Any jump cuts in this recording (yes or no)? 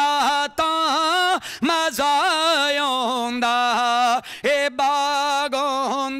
no